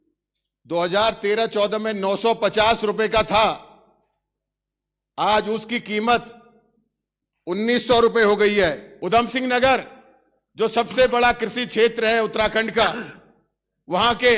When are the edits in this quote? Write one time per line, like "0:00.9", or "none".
0:08.9